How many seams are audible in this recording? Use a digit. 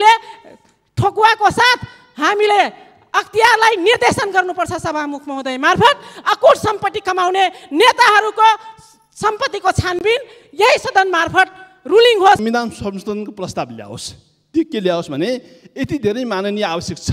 1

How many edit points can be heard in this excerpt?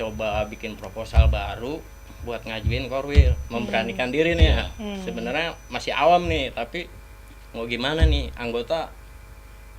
0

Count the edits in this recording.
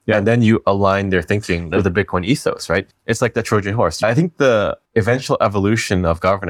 4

